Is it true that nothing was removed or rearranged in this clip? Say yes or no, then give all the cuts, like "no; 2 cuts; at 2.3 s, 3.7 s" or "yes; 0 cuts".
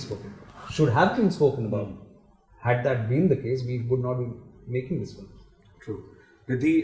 yes; 0 cuts